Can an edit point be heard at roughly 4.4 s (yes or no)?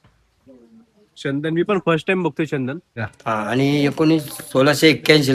no